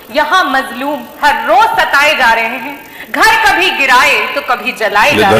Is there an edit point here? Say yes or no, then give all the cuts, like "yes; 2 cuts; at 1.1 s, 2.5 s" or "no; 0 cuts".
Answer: no; 0 cuts